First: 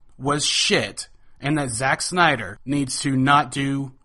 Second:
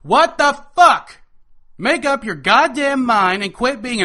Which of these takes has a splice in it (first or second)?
first